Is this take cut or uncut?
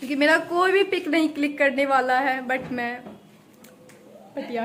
uncut